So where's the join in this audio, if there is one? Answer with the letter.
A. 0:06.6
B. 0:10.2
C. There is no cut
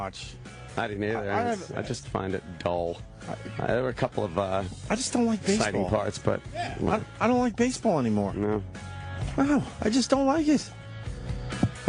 C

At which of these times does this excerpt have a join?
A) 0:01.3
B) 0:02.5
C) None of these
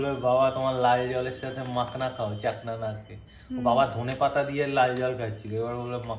C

